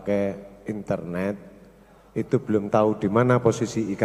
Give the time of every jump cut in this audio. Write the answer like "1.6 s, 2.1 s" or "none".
none